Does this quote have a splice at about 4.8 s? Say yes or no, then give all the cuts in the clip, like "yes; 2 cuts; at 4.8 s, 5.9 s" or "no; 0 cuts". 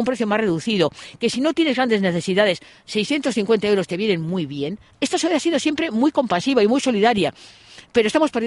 yes; 1 cut; at 4.8 s